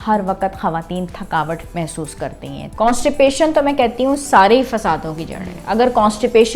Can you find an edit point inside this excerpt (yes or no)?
yes